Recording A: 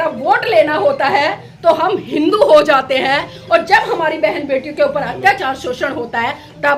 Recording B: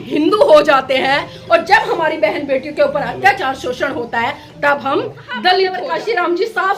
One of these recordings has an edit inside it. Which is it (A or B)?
B